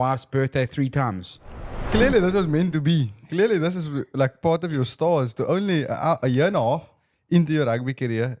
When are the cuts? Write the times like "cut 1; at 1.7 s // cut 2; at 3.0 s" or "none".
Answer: cut 1; at 1.8 s